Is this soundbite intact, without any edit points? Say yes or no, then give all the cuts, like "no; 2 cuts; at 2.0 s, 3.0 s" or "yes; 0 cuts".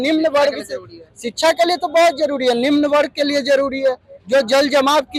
yes; 0 cuts